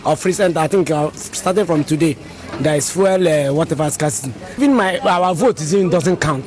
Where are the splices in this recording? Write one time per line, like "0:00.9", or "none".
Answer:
0:04.6